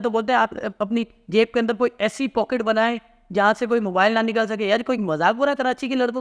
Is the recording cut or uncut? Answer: uncut